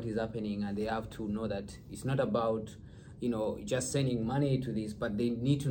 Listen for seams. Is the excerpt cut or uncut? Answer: uncut